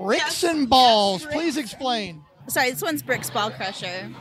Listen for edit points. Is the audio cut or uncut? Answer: cut